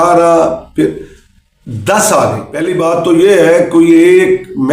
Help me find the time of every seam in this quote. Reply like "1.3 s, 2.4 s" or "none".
2.5 s